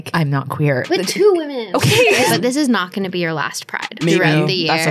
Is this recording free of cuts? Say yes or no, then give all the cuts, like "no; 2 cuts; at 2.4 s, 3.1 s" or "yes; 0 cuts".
no; 3 cuts; at 0.9 s, 2.3 s, 3.9 s